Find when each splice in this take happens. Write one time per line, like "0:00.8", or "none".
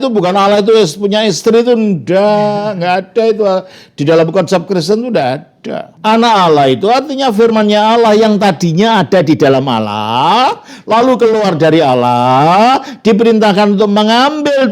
0:05.9